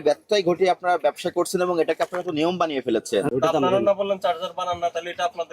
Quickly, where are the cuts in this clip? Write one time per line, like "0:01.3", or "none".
0:03.3